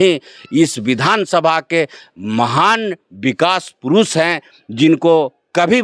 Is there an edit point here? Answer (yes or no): no